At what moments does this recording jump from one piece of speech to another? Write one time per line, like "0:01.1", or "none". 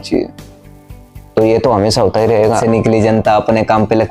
0:02.6